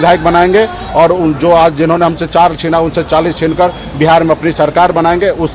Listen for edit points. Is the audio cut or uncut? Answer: uncut